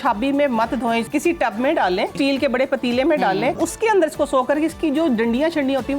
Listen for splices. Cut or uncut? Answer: cut